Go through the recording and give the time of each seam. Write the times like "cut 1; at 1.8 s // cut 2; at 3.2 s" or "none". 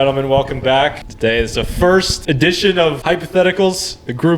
cut 1; at 1.0 s // cut 2; at 2.1 s // cut 3; at 3.0 s